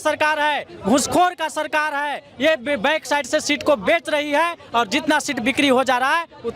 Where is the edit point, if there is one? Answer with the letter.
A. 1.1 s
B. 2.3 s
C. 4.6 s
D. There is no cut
D